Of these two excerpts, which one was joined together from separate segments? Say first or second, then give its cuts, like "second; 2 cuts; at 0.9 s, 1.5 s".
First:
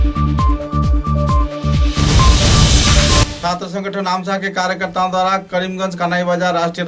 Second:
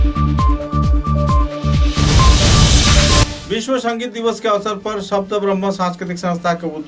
second; 1 cut; at 3.3 s